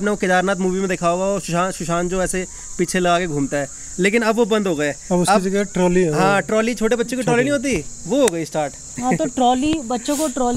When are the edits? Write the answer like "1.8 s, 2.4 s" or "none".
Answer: none